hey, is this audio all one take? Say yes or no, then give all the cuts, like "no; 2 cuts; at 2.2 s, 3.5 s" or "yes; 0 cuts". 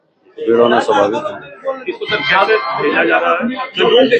yes; 0 cuts